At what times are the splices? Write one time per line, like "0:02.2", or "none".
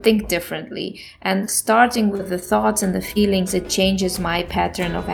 none